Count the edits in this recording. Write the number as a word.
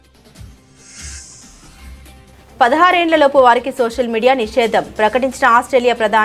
one